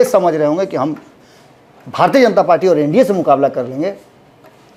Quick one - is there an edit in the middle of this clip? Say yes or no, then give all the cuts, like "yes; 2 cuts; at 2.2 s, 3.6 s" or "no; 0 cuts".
no; 0 cuts